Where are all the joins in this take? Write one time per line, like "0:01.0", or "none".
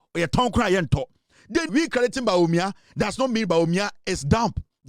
0:01.7